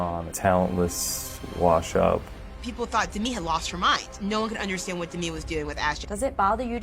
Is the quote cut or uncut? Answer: cut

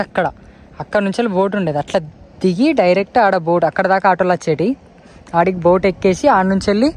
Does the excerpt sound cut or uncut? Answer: uncut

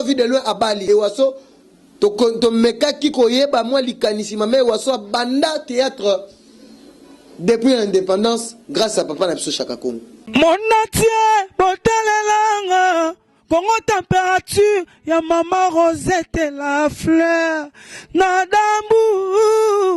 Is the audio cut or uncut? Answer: cut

